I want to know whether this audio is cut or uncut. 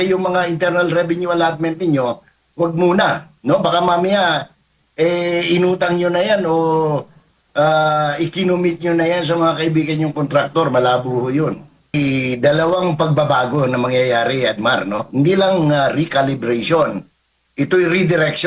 cut